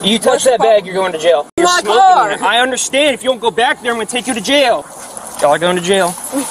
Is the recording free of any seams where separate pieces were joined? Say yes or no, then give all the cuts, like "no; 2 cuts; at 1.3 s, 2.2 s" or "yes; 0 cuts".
no; 2 cuts; at 1.5 s, 4.9 s